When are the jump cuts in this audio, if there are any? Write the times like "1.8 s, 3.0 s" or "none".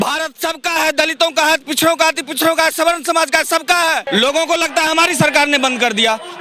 4.0 s